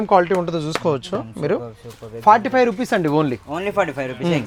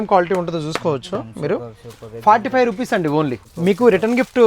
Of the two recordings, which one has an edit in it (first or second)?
second